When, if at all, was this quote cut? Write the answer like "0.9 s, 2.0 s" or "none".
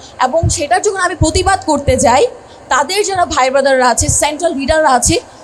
none

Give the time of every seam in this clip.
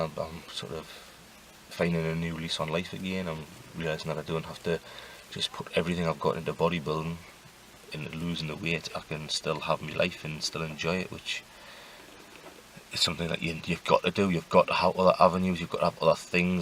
none

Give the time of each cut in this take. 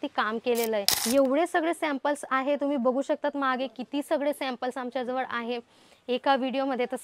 0.9 s

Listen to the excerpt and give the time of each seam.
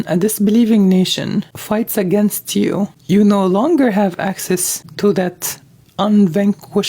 1.6 s, 3.0 s, 4.8 s

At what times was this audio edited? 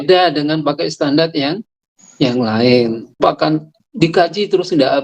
3.2 s

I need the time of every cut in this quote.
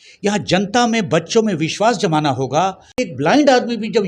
2.9 s

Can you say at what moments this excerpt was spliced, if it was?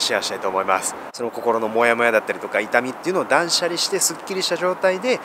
1.1 s

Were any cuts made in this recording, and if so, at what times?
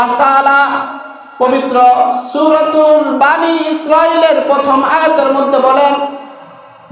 none

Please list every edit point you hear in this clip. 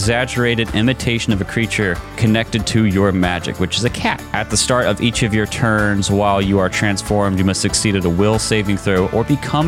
2.1 s, 4.2 s

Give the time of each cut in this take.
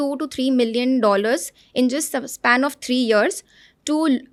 none

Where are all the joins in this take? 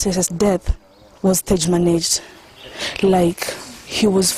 none

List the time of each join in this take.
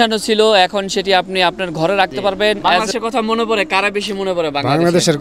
2.7 s

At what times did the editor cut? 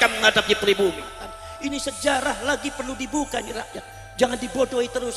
1.4 s

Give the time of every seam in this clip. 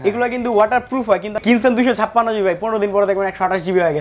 1.4 s

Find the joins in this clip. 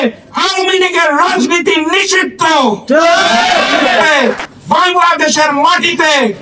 4.1 s

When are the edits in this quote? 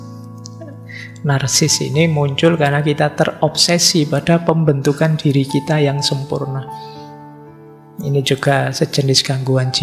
6.6 s, 7.9 s

